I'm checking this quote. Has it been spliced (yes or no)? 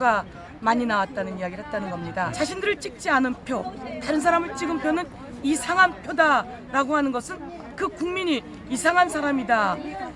yes